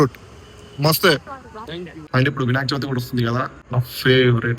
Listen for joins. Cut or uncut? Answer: cut